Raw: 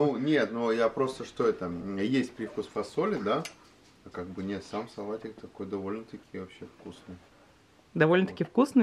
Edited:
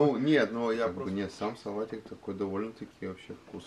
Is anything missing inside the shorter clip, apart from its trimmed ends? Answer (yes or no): yes